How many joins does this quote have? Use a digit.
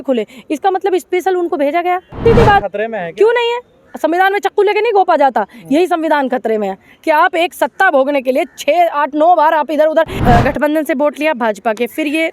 2